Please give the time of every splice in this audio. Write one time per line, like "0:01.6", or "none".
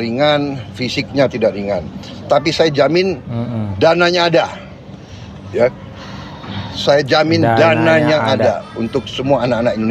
none

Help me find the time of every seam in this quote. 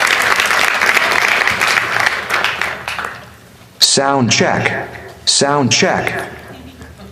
none

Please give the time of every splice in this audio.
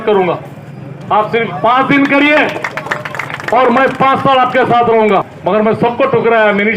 0:05.3

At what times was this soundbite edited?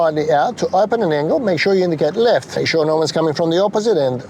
0:02.5

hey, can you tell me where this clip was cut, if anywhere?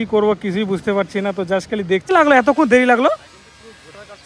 0:02.1

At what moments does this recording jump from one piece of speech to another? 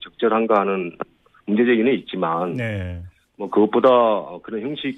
0:03.9

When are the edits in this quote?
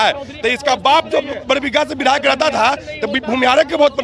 none

